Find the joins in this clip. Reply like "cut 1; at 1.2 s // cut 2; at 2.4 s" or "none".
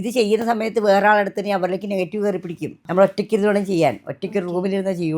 cut 1; at 2.7 s